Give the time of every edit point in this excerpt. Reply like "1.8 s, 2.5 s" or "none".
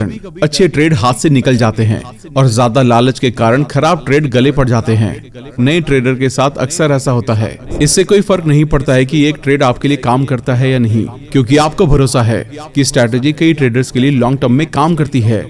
7.6 s